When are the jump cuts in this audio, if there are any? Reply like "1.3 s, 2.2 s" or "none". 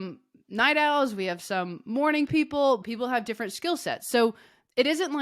2.8 s